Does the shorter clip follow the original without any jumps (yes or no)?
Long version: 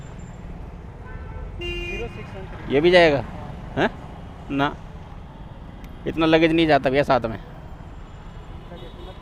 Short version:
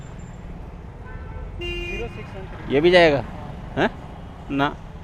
yes